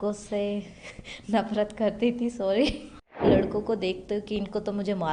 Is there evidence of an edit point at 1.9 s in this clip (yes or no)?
no